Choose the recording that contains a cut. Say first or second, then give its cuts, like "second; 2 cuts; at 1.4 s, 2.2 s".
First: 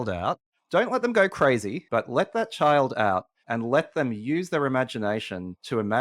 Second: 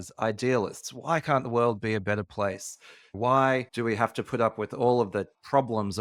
first; 2 cuts; at 1.8 s, 3.4 s